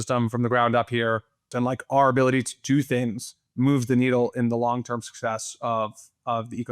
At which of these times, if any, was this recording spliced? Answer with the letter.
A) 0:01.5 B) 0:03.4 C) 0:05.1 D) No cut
A